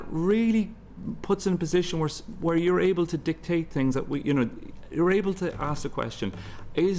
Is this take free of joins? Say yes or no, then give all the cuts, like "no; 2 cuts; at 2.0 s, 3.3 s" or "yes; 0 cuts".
yes; 0 cuts